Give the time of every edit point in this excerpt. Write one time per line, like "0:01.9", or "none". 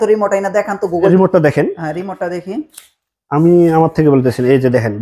0:01.1